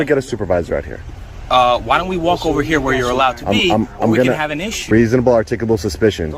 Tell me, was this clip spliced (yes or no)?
yes